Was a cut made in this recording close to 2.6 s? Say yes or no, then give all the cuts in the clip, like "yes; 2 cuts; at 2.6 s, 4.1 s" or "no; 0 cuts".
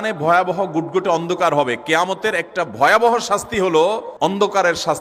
no; 1 cut; at 4.1 s